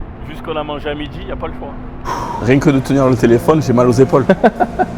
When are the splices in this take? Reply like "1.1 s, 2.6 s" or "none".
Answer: 2.0 s